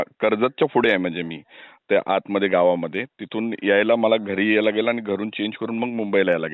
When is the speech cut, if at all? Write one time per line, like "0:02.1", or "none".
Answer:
0:04.6